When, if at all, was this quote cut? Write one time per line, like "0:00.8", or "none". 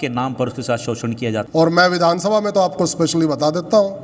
0:01.4